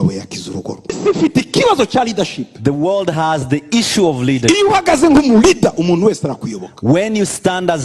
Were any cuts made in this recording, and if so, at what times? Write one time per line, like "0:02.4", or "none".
0:01.0